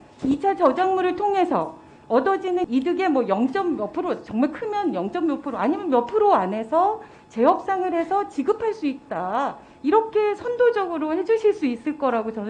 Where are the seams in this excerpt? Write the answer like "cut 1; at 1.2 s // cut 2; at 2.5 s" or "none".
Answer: none

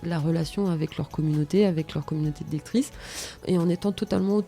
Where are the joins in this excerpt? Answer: cut 1; at 3.4 s

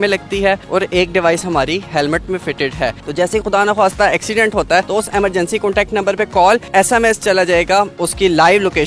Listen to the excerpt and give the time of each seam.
cut 1; at 3.0 s // cut 2; at 4.9 s // cut 3; at 6.6 s // cut 4; at 8.0 s

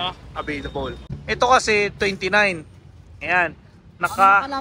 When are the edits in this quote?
cut 1; at 1.1 s

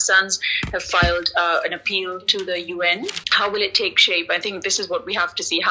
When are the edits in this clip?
cut 1; at 3.2 s

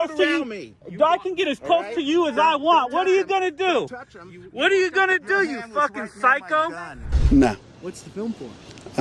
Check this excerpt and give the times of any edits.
cut 1; at 7.1 s

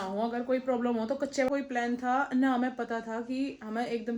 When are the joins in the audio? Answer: cut 1; at 1.5 s

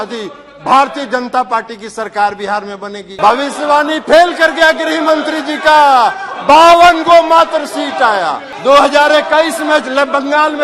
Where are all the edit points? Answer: cut 1; at 3.1 s // cut 2; at 8.5 s

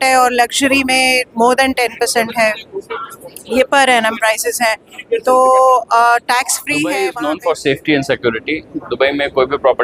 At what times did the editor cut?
cut 1; at 6.9 s

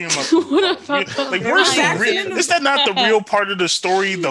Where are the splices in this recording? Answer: none

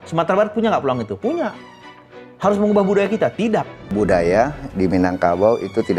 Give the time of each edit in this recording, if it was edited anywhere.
cut 1; at 3.9 s

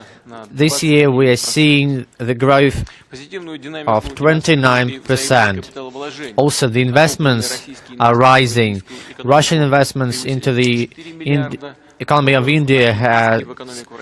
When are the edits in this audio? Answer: cut 1; at 4.7 s

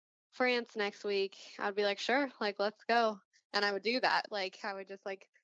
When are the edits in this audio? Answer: none

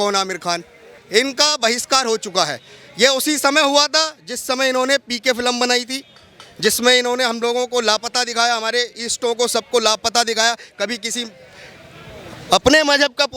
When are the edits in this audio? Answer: cut 1; at 0.9 s

